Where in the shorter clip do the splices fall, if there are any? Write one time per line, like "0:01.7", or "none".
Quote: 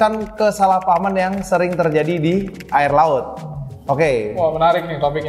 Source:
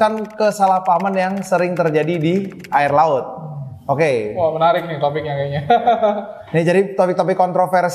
none